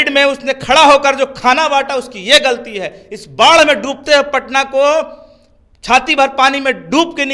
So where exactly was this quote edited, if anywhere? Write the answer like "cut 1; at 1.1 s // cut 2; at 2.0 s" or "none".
none